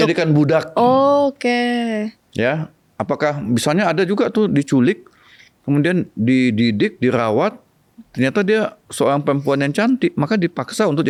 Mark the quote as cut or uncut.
uncut